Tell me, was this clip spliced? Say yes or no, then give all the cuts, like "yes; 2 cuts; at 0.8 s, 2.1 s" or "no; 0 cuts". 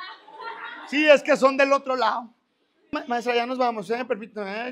yes; 1 cut; at 3.1 s